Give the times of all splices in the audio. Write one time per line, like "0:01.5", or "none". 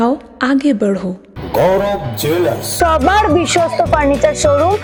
none